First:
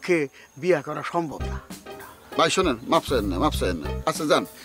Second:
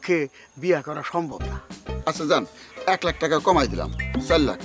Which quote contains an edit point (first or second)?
second